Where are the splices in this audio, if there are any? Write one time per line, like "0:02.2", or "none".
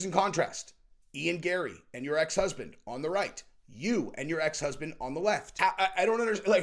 0:05.5